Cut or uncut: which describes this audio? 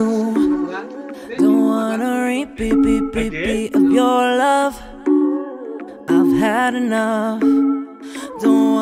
uncut